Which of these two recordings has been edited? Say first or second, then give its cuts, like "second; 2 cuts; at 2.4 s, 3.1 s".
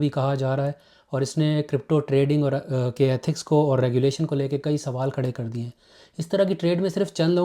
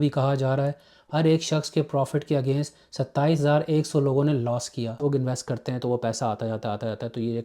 second; 2 cuts; at 0.9 s, 5.0 s